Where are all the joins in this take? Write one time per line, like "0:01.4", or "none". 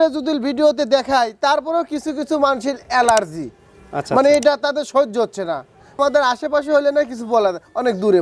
0:06.0